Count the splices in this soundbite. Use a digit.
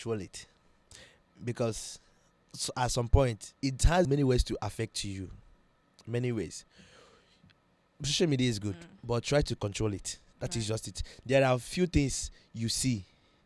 1